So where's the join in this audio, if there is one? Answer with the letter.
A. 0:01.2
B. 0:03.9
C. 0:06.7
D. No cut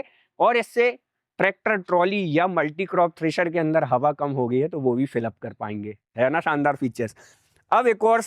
D